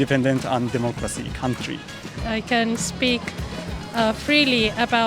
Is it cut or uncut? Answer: cut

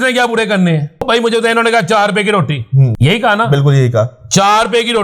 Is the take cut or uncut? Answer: cut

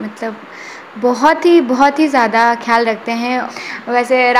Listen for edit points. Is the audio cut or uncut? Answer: cut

